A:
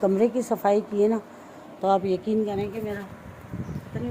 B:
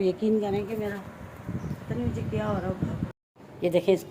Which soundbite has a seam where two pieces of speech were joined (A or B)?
B